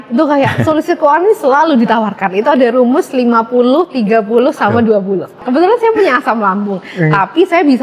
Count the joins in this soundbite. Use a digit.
1